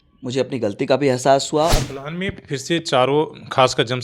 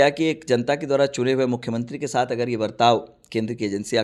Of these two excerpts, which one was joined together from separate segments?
first; 1 cut; at 1.8 s

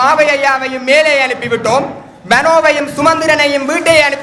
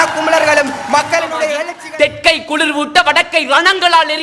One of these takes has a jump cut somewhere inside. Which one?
second; 1 cut; at 1.7 s

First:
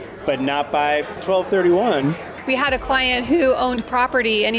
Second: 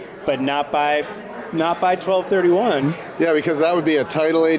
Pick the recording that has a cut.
first; 2 cuts; at 1.2 s, 2.3 s

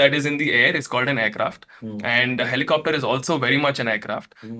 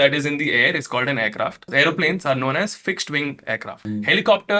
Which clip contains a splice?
second; 2 cuts; at 1.7 s, 3.7 s

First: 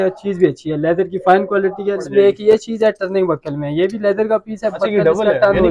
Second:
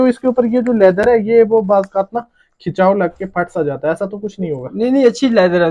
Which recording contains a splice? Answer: first; 1 cut; at 2.0 s

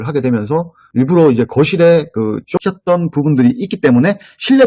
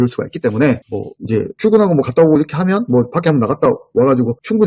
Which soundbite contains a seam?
first; 1 cut; at 2.5 s

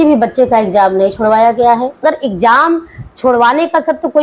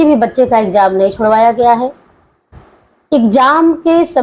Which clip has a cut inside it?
first; 1 cut; at 2.0 s

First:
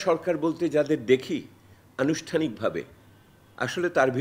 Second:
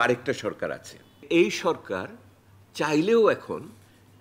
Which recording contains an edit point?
second; 1 cut; at 1.2 s

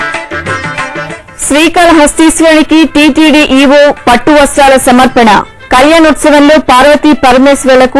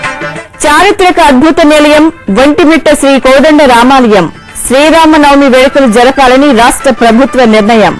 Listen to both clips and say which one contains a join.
first; 1 cut; at 1.1 s

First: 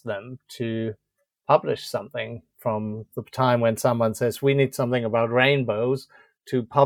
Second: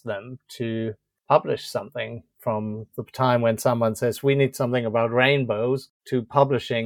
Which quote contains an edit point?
second; 2 cuts; at 1.1 s, 5.9 s

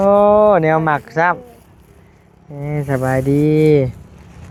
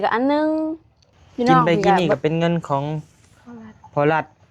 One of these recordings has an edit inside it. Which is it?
second; 1 cut; at 1.6 s

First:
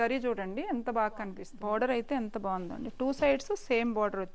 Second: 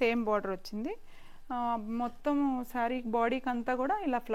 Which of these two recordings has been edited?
first; 1 cut; at 1.4 s

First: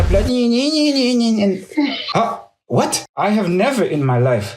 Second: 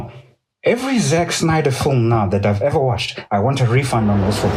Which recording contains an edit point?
first; 2 cuts; at 2.0 s, 3.0 s

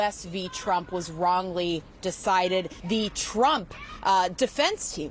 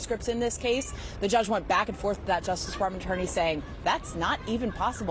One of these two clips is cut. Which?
first; 1 cut; at 2.7 s

